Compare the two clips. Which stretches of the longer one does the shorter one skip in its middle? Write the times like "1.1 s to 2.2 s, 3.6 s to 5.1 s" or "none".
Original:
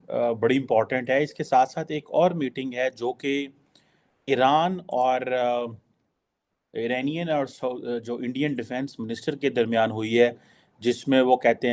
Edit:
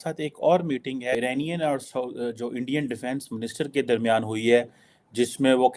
2.9 s to 6.8 s